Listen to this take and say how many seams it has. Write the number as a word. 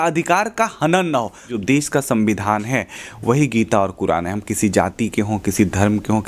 one